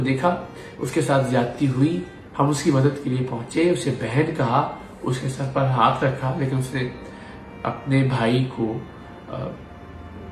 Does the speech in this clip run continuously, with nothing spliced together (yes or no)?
yes